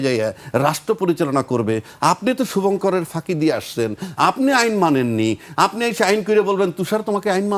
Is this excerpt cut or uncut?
uncut